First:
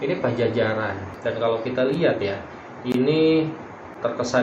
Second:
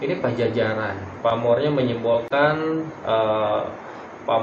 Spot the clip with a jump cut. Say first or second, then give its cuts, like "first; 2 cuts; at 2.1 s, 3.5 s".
first; 1 cut; at 1.0 s